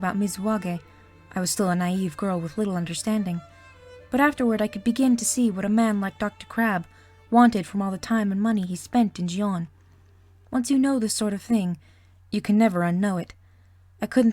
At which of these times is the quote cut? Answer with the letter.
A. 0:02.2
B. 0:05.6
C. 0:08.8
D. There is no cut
C